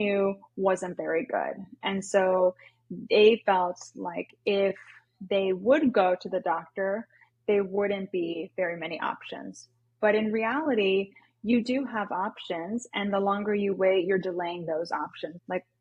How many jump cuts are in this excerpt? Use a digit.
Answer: 0